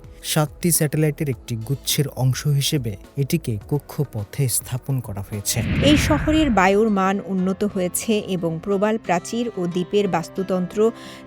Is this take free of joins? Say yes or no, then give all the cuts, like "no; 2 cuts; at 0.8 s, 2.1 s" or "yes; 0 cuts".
no; 1 cut; at 5.6 s